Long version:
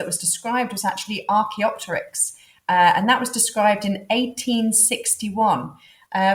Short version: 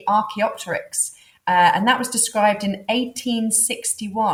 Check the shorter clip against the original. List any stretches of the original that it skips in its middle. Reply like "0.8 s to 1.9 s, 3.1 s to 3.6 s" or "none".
none